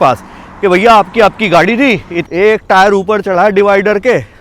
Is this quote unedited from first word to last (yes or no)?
no